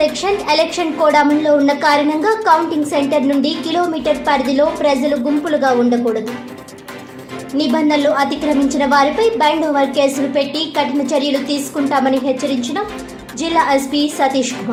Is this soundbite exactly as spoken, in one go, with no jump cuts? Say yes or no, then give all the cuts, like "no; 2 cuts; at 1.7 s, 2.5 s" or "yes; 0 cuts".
yes; 0 cuts